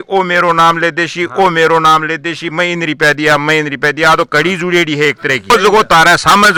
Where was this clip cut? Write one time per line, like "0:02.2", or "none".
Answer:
none